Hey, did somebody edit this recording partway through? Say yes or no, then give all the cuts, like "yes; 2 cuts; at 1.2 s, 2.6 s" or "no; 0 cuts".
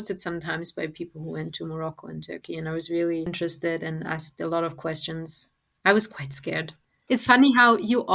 no; 0 cuts